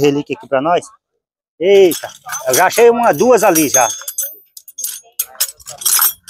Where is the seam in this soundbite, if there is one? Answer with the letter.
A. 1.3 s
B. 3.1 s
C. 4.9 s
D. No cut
D